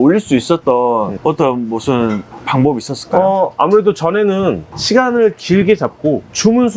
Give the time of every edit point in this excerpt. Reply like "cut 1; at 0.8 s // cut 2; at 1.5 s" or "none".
none